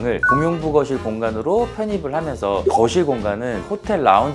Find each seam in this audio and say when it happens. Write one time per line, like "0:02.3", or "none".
0:02.6